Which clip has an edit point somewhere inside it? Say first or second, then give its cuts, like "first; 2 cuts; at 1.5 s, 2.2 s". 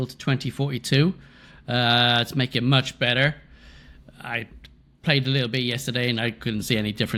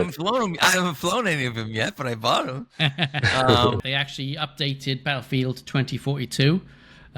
second; 1 cut; at 3.8 s